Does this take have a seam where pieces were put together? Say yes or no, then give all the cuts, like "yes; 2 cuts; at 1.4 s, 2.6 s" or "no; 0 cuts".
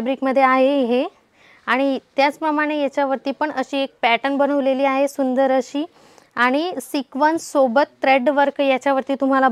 no; 0 cuts